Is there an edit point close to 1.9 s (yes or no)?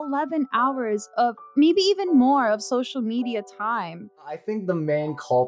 no